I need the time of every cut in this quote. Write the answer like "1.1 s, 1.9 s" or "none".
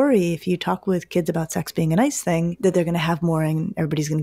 2.5 s

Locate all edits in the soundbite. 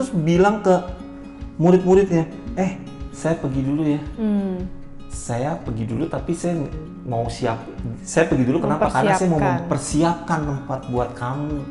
none

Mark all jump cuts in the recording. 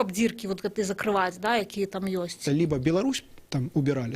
2.4 s

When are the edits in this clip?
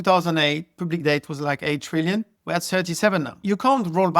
2.4 s, 3.4 s

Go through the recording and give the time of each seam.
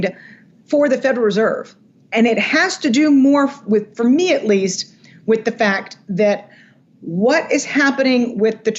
none

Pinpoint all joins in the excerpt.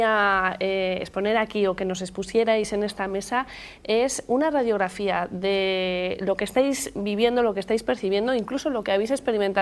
none

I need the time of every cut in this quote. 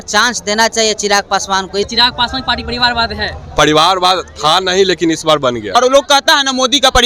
1.9 s, 5.8 s

